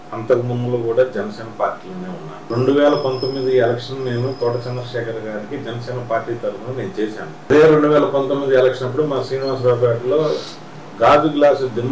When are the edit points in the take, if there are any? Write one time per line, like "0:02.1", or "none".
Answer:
0:02.4
0:07.5